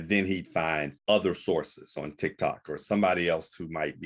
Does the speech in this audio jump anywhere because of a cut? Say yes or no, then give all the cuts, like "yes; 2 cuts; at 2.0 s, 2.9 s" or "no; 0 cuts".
no; 0 cuts